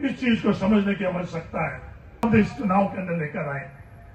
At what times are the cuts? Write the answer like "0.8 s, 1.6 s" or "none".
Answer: 2.2 s